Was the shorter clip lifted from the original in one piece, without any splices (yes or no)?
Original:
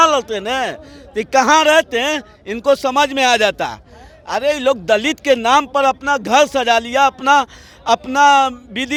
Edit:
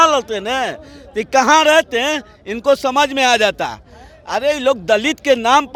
yes